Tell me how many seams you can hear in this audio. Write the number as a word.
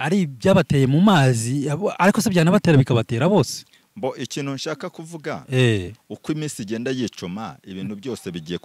zero